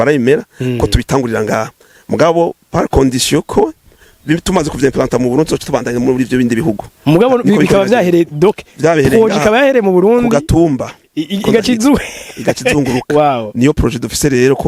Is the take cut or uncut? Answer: uncut